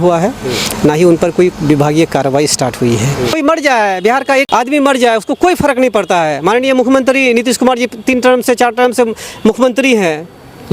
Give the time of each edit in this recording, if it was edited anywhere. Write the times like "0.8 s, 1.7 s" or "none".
3.4 s, 4.5 s